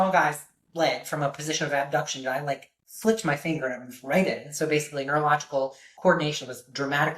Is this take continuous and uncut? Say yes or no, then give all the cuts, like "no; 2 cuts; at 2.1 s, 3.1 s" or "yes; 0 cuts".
no; 1 cut; at 5.9 s